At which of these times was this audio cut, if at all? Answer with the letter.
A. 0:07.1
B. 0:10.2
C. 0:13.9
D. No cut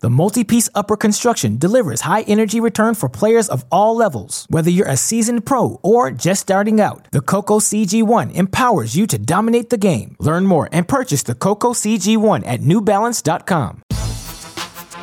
C